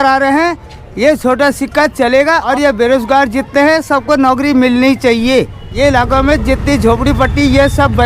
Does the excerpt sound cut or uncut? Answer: cut